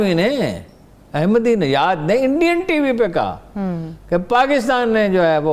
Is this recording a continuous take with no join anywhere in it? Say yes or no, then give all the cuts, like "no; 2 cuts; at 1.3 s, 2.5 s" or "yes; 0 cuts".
yes; 0 cuts